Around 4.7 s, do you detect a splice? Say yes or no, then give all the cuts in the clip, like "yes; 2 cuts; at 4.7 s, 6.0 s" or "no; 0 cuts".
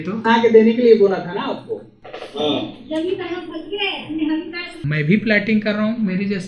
yes; 1 cut; at 4.7 s